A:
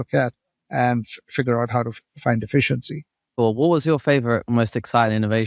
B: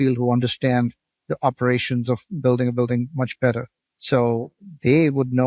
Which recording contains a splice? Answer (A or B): A